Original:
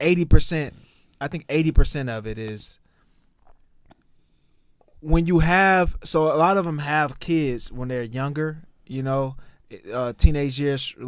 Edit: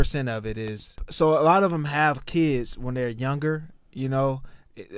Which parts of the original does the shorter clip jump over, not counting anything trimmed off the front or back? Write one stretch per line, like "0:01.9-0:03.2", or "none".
0:02.9-0:06.0